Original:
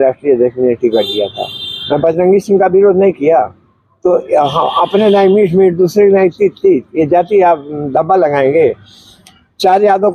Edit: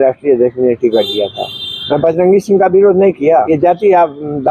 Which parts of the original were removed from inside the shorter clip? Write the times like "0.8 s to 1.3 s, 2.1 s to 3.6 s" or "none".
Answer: 3.5 s to 6.9 s